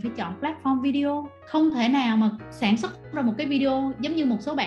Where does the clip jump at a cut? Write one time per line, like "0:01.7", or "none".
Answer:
0:01.3
0:02.5